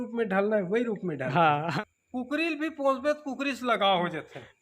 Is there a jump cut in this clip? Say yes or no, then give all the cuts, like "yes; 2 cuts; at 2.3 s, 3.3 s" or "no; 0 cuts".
yes; 1 cut; at 1.7 s